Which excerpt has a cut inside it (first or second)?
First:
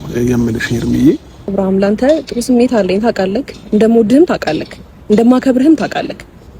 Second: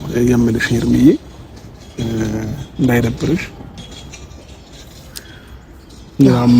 first